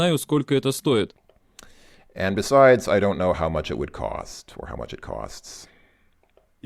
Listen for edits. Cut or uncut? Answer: uncut